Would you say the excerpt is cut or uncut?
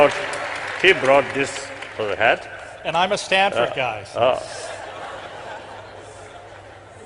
cut